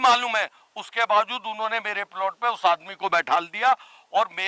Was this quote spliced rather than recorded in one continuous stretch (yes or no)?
no